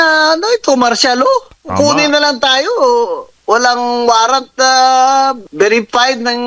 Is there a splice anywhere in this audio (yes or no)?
yes